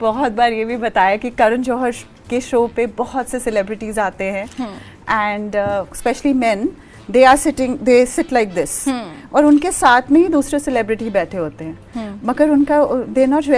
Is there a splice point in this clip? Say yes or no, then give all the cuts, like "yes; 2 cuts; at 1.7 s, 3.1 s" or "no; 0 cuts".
no; 0 cuts